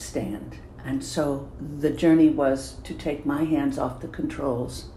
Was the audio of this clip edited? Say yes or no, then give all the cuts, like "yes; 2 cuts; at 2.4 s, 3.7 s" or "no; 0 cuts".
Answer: yes; 1 cut; at 1.6 s